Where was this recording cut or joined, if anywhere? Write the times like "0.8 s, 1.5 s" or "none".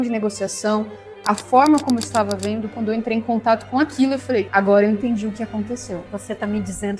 2.8 s, 4.5 s, 6.1 s